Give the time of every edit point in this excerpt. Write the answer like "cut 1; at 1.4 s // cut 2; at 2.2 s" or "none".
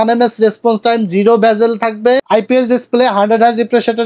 cut 1; at 2.2 s